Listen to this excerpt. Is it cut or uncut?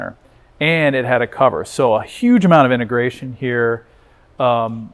uncut